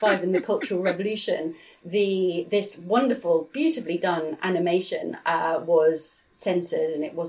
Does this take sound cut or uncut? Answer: uncut